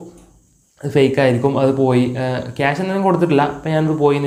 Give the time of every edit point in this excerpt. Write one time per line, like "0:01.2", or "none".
none